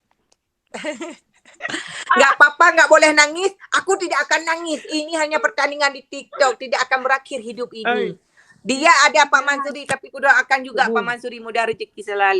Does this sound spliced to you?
yes; 1 cut; at 1.7 s

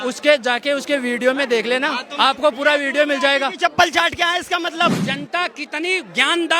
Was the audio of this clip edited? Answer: yes; 1 cut; at 5.0 s

